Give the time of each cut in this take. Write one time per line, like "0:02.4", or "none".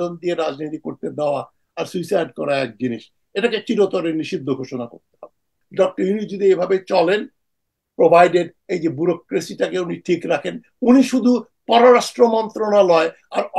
0:05.6